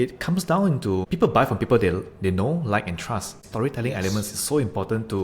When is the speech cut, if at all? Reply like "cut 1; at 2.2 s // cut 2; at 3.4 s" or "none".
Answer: cut 1; at 1.1 s // cut 2; at 3.4 s